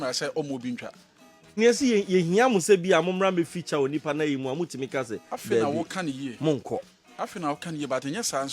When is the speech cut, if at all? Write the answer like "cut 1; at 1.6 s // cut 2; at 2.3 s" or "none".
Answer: cut 1; at 1.5 s